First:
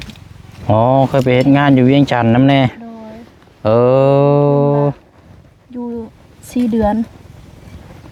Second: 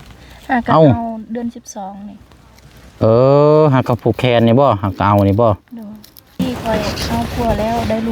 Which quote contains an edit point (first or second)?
second